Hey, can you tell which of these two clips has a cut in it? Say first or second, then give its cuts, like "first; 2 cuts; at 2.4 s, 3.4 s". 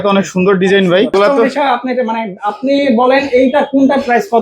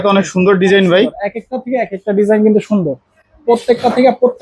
first; 1 cut; at 1.1 s